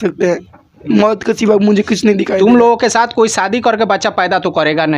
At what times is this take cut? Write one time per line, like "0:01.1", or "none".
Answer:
0:02.3